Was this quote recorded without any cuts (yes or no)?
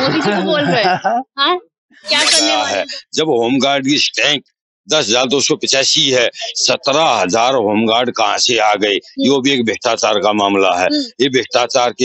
no